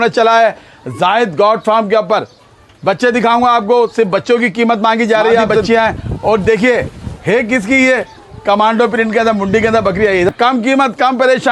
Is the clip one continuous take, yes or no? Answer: no